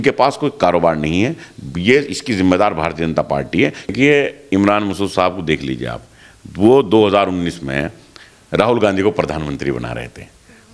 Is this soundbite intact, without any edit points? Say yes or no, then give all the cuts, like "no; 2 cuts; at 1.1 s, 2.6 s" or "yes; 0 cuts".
no; 1 cut; at 3.9 s